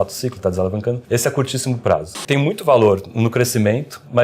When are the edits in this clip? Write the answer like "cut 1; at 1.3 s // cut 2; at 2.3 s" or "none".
cut 1; at 1.0 s // cut 2; at 2.1 s

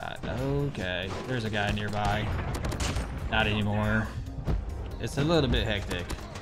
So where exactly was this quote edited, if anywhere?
cut 1; at 4.4 s

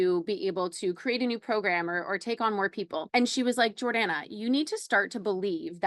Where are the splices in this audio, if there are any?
cut 1; at 3.0 s

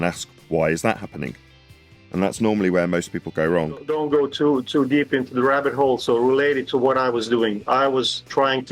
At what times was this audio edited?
cut 1; at 3.9 s

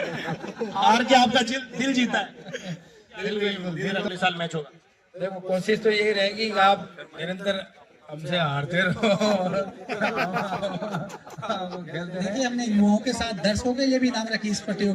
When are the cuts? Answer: cut 1; at 4.1 s // cut 2; at 12.3 s

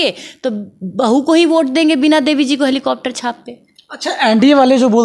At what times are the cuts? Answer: none

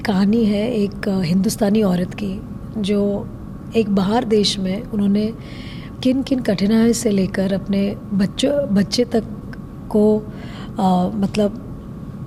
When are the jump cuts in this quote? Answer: none

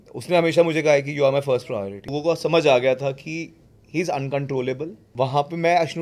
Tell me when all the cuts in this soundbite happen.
cut 1; at 2.2 s // cut 2; at 5.0 s

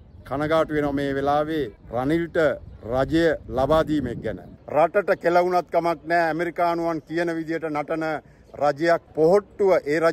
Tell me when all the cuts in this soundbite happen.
cut 1; at 1.8 s // cut 2; at 3.4 s // cut 3; at 4.5 s // cut 4; at 9.1 s

